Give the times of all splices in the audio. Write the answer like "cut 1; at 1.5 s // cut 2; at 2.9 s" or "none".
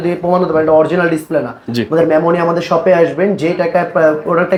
none